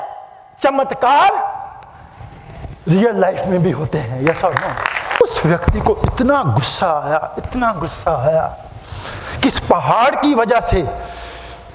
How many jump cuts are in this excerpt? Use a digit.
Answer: 1